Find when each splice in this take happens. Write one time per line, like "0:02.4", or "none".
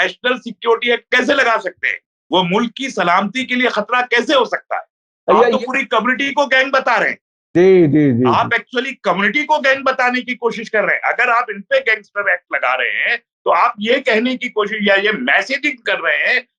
0:05.1